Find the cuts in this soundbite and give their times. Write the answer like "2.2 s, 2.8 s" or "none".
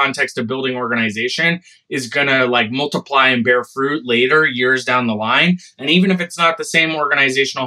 none